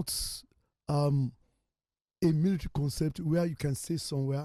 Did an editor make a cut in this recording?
no; 0 cuts

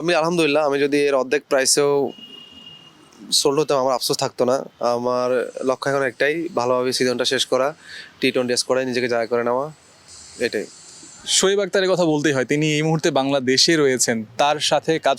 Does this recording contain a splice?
no; 0 cuts

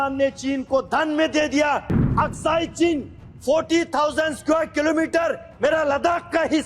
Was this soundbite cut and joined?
yes; 1 cut; at 1.9 s

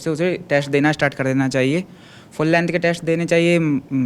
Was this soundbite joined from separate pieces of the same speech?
no; 0 cuts

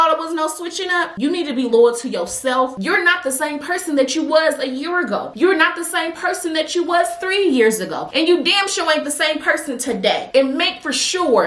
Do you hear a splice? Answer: yes; 3 cuts; at 1.1 s, 2.7 s, 10.2 s

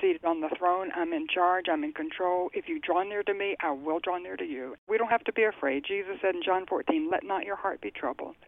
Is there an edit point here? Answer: yes; 1 cut; at 4.9 s

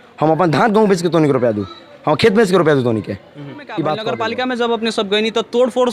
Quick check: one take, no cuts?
no; 1 cut; at 4.1 s

